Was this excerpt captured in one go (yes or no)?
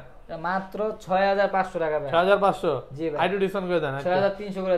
yes